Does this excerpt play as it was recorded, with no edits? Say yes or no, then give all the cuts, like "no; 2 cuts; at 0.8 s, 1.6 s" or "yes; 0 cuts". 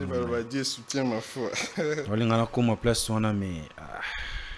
yes; 0 cuts